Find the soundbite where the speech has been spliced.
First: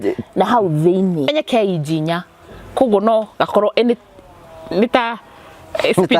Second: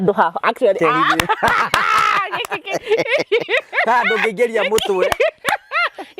first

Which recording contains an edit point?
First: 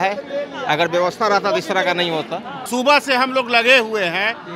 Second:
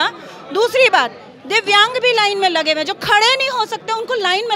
first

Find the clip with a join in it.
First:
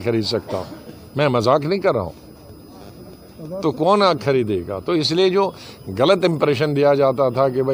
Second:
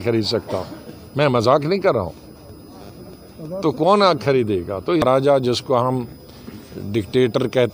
second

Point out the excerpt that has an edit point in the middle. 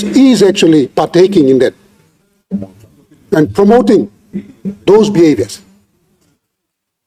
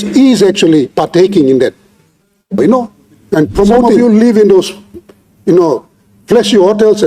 second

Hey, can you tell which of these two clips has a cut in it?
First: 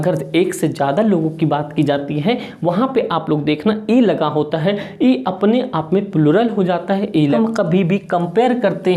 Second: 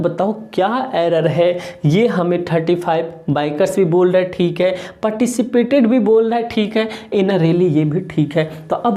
first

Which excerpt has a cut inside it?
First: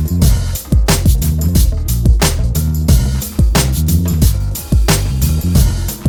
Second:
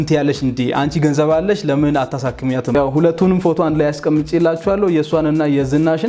second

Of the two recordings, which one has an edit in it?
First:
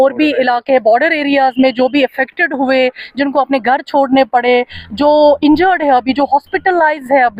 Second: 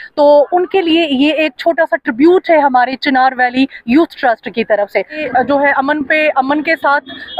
second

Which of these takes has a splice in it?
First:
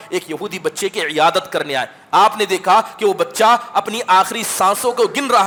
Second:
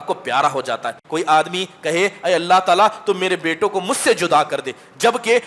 second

